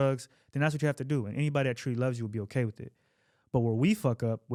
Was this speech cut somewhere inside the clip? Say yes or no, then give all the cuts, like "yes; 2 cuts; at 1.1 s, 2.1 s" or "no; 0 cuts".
no; 0 cuts